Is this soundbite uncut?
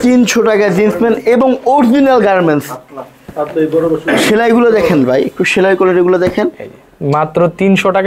yes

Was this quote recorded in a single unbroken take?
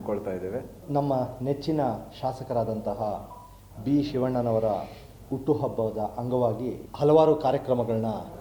no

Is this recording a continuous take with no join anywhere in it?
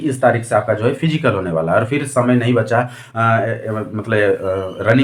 yes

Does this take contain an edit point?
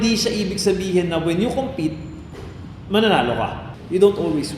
yes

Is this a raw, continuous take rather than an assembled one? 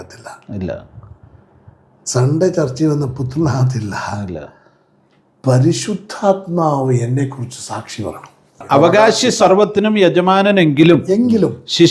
no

